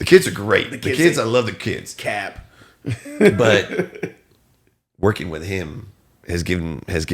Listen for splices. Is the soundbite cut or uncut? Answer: uncut